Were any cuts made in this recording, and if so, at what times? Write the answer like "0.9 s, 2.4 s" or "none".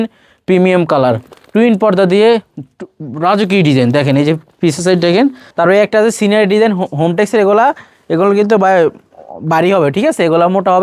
5.4 s

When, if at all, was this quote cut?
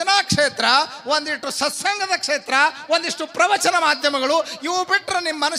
none

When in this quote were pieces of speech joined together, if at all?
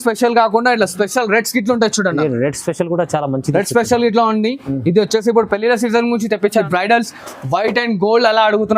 6.7 s

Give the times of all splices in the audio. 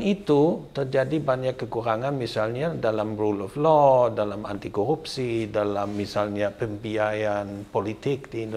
none

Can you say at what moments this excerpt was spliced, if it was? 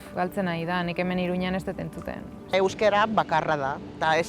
2.5 s

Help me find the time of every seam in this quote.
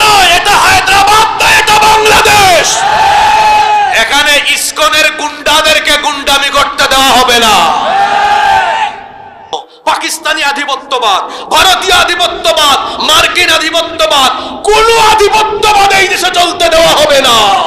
9.5 s

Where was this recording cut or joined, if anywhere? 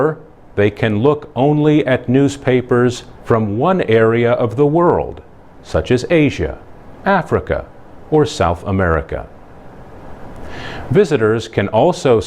9.1 s

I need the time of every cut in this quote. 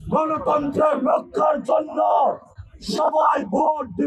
none

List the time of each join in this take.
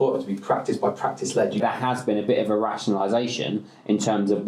1.6 s

